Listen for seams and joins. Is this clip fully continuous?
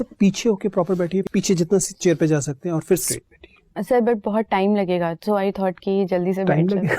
no; 2 cuts; at 1.3 s, 3.1 s

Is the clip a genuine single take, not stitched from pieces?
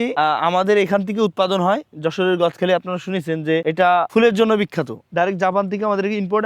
no; 1 cut; at 5.1 s

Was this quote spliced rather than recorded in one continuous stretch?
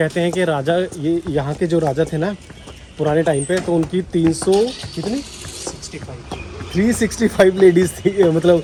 no; 0 cuts

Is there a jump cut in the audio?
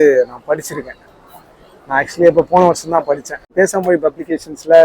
yes; 1 cut; at 3.5 s

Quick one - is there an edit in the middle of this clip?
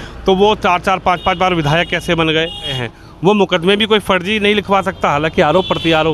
yes; 1 cut; at 2.8 s

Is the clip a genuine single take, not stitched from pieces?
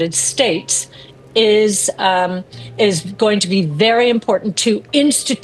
yes; 0 cuts

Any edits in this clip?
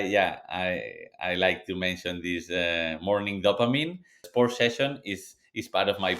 yes; 1 cut; at 4.2 s

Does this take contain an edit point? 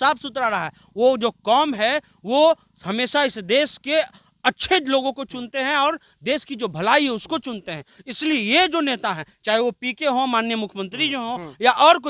no; 0 cuts

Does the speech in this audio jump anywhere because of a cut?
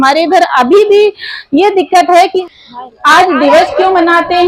yes; 1 cut; at 2.4 s

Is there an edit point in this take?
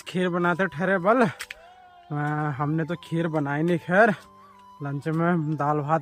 no; 0 cuts

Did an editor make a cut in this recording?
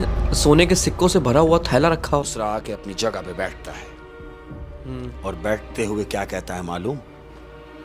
yes; 1 cut; at 2.3 s

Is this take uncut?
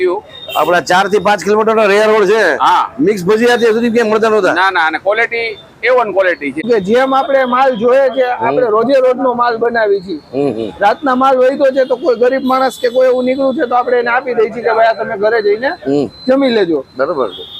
no; 1 cut; at 6.6 s

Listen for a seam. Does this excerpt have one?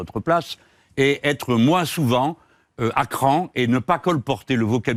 no; 0 cuts

